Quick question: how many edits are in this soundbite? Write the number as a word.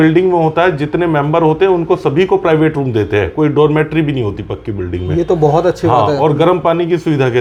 zero